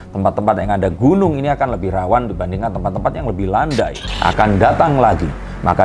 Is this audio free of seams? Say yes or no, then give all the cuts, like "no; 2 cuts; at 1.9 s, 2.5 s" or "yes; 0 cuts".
no; 1 cut; at 4.1 s